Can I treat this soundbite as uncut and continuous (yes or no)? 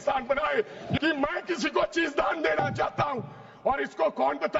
no